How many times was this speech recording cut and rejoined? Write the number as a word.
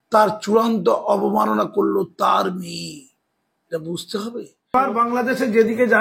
one